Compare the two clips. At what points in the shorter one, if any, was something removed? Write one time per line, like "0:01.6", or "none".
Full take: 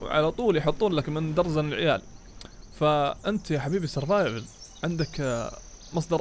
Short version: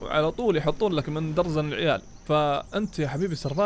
0:02.1